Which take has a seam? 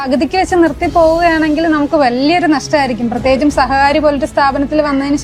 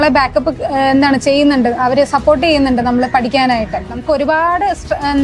second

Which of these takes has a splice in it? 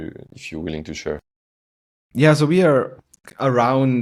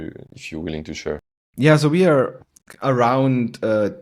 second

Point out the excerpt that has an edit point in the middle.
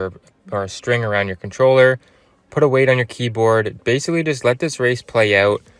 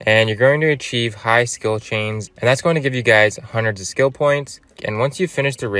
second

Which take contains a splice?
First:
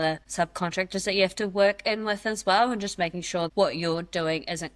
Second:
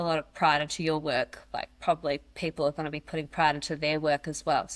first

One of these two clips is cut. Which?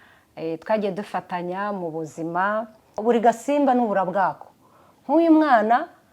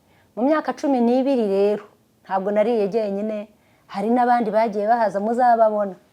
first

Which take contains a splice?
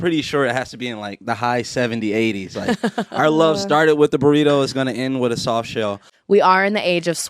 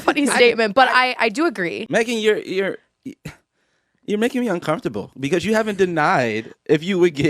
first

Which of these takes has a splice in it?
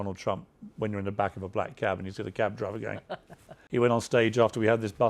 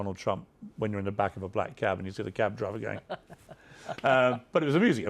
first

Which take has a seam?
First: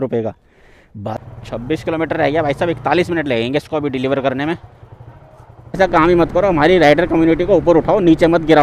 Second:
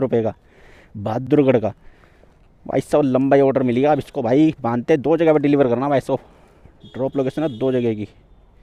first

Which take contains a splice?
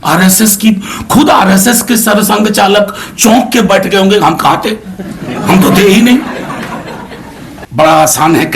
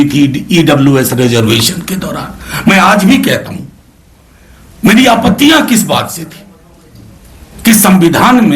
first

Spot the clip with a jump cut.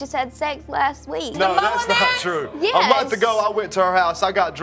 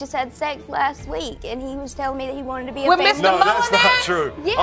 first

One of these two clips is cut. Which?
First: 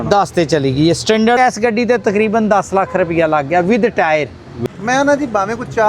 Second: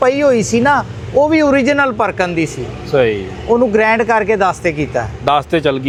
first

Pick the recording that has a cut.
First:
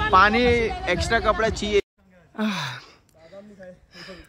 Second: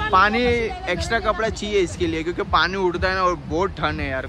first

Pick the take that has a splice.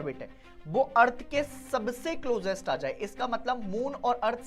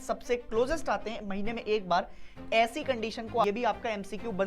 second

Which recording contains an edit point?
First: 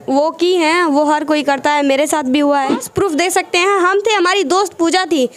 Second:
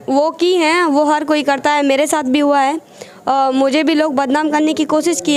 first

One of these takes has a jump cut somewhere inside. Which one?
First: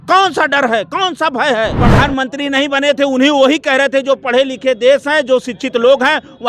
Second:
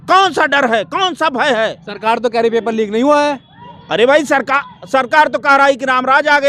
first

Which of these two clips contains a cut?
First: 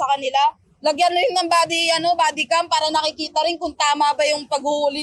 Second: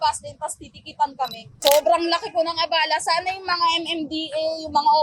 second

